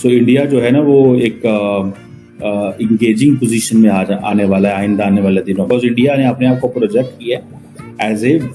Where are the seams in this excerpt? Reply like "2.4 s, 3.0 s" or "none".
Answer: 5.7 s